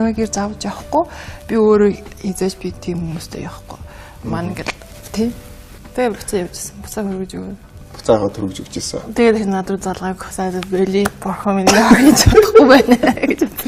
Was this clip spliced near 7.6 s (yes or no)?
no